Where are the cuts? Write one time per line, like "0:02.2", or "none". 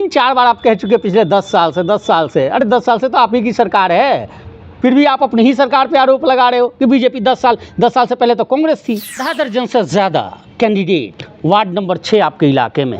0:09.2